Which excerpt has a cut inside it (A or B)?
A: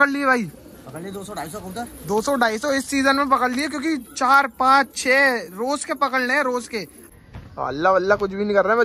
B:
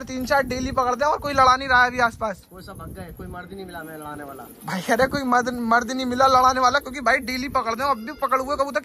A